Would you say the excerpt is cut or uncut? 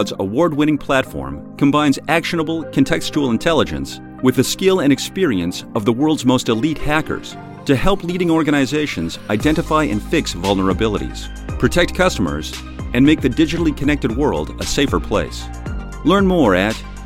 uncut